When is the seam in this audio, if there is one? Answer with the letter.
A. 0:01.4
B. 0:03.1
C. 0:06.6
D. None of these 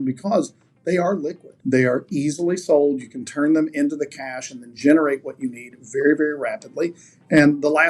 A